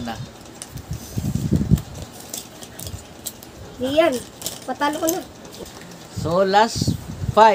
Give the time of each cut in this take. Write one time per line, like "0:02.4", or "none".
0:05.5